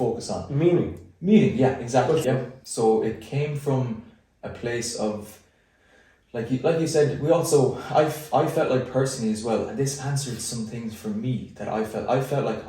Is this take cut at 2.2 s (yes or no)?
yes